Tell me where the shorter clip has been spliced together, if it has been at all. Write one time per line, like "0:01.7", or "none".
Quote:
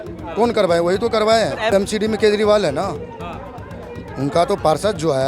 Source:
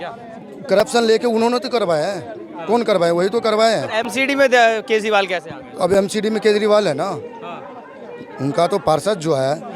0:01.7